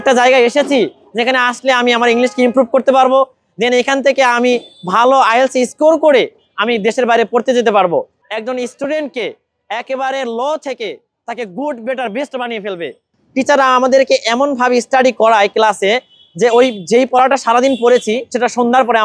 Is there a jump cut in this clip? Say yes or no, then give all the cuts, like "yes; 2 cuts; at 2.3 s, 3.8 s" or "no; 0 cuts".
yes; 2 cuts; at 8.2 s, 13.2 s